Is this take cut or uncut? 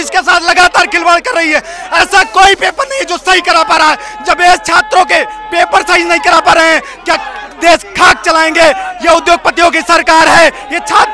uncut